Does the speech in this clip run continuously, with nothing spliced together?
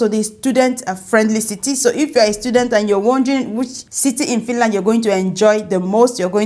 no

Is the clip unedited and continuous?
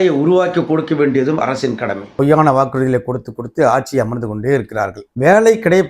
no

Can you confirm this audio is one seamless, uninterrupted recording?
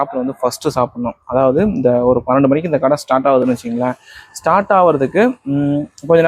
yes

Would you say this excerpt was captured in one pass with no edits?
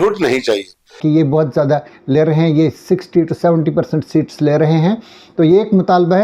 no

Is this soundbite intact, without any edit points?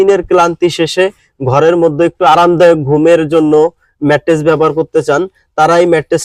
yes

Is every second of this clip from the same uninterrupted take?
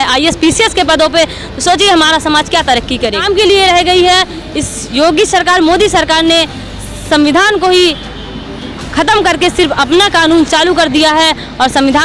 no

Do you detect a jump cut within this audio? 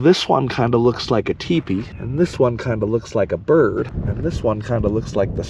yes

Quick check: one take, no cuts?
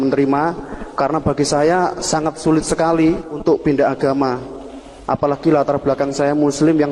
no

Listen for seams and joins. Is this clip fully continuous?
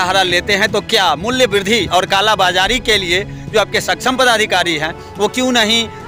yes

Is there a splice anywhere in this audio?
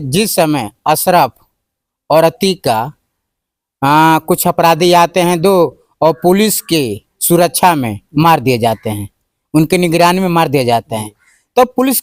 no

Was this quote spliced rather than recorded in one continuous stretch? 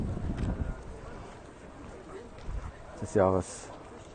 no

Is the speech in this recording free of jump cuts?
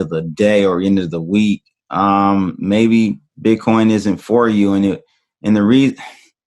no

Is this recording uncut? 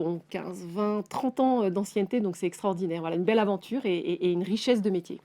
yes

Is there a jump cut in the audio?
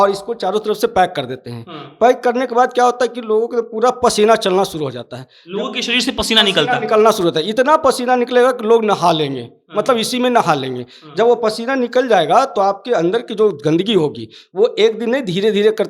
no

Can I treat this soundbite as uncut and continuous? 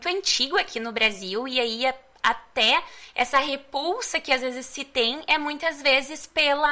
yes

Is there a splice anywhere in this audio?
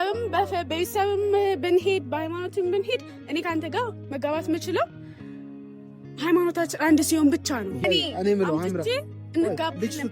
yes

